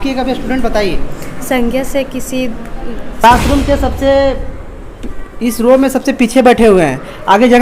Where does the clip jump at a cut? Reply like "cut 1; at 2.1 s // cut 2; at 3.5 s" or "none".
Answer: cut 1; at 3.2 s

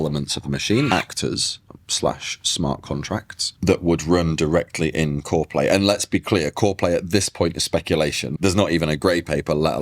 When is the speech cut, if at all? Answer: cut 1; at 0.9 s // cut 2; at 8.3 s

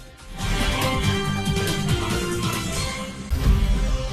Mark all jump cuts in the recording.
cut 1; at 3.1 s

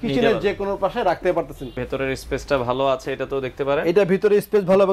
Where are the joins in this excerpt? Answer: cut 1; at 1.8 s

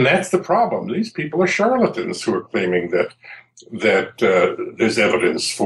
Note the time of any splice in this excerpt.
none

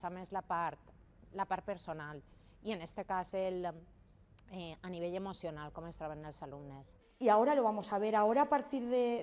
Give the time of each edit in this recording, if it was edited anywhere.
cut 1; at 7.0 s

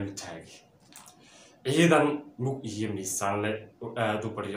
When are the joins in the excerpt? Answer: none

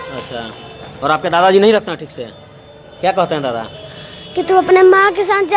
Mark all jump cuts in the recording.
none

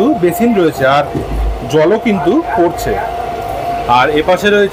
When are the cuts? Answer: none

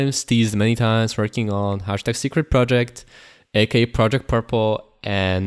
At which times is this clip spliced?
none

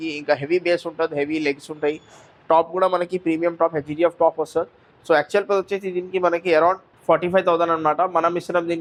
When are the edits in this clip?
none

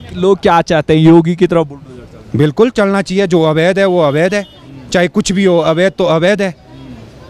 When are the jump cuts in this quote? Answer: none

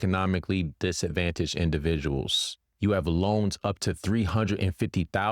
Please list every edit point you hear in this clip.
cut 1; at 2.6 s

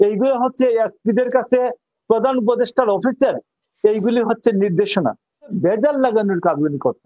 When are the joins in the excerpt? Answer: cut 1; at 5.5 s

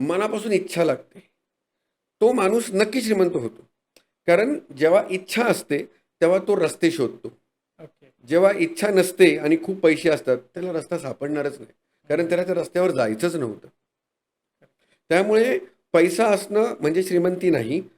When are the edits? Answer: none

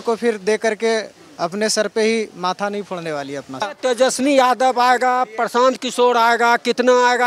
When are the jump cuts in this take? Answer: cut 1; at 3.7 s

